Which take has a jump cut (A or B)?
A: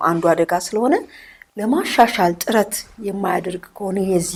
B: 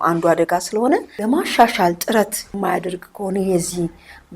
B